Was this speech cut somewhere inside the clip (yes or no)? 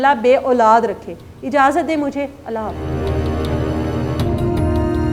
no